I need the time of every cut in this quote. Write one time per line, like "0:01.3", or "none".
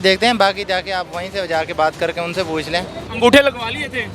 0:03.0